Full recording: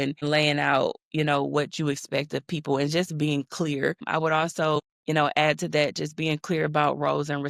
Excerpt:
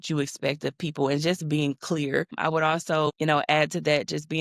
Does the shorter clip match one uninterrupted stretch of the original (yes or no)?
no